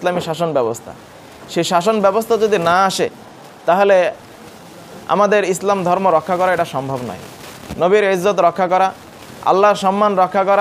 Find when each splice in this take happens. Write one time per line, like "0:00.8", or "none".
none